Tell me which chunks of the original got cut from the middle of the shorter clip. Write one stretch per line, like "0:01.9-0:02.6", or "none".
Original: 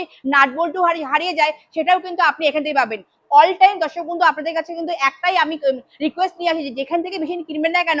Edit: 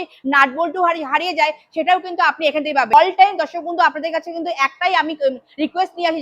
0:02.9-0:03.4